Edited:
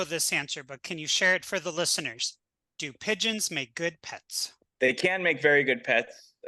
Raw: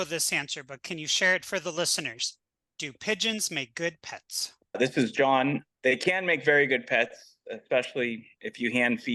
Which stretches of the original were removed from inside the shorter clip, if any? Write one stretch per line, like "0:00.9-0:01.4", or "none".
0:04.6-0:05.7